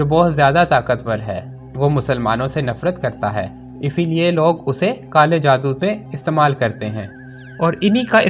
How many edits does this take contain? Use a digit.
1